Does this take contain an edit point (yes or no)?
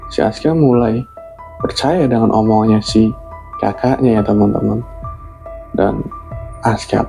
no